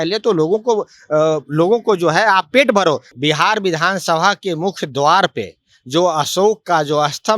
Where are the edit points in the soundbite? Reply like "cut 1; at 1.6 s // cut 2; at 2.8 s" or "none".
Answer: cut 1; at 3.1 s

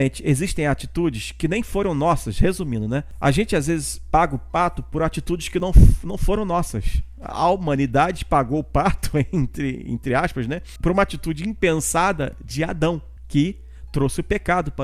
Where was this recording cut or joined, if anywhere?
cut 1; at 3.1 s // cut 2; at 10.7 s // cut 3; at 13.1 s

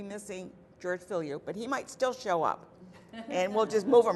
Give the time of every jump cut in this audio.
cut 1; at 1.7 s

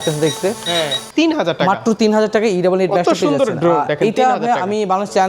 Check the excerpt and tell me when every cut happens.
cut 1; at 1.0 s

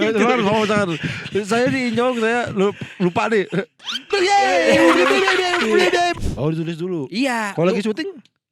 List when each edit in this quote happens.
cut 1; at 6.1 s

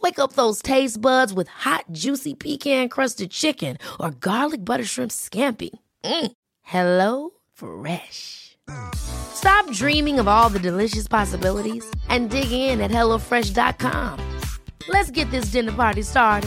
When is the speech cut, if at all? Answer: none

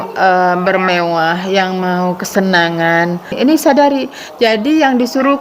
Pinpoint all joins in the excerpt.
cut 1; at 3.3 s

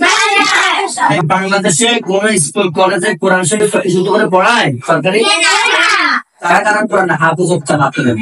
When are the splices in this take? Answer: cut 1; at 1.1 s // cut 2; at 6.6 s

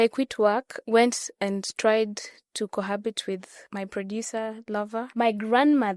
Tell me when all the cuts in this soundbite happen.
cut 1; at 3.6 s // cut 2; at 5.1 s

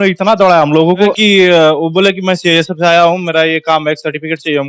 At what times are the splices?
cut 1; at 1.2 s

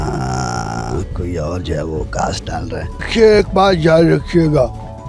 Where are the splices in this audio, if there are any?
cut 1; at 3.1 s

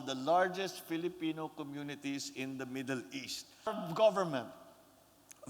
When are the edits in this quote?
cut 1; at 3.8 s

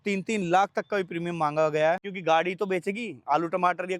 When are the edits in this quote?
cut 1; at 2.1 s

